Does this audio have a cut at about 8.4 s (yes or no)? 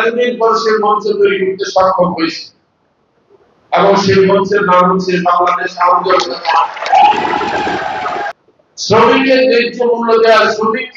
yes